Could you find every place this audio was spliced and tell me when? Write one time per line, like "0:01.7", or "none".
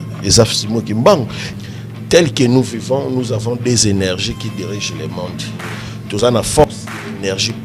0:01.4